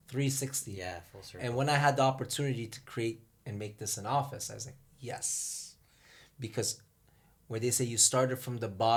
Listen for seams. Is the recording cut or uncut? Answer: uncut